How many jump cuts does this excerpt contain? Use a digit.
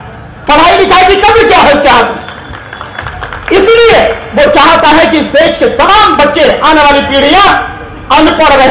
0